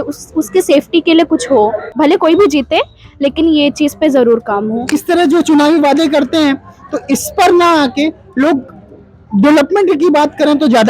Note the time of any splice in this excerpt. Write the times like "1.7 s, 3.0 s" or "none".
1.8 s, 4.9 s